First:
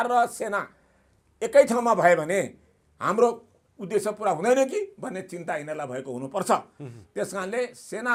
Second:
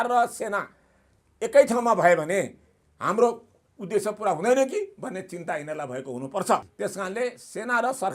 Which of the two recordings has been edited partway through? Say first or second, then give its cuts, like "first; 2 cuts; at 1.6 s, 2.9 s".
second; 1 cut; at 6.7 s